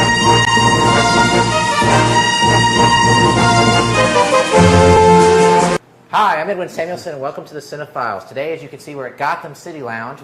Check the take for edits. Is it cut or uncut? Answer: uncut